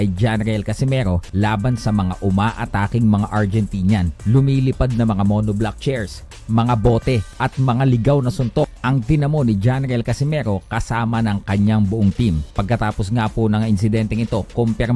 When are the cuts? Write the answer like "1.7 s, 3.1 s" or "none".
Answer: 1.3 s, 4.2 s, 7.3 s, 8.8 s, 12.5 s, 13.5 s